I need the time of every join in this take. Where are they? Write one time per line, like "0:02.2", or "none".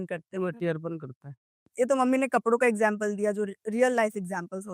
0:01.6